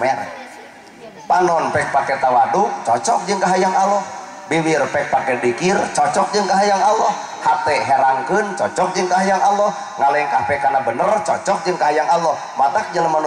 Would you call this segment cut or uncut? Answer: uncut